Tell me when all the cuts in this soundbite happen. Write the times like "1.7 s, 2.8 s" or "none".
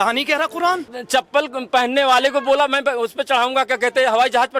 1.0 s